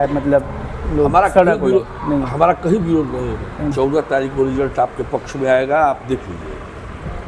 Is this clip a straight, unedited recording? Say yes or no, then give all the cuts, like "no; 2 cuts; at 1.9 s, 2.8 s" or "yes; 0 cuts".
no; 1 cut; at 3.7 s